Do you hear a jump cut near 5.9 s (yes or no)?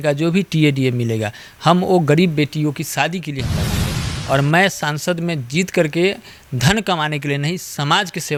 no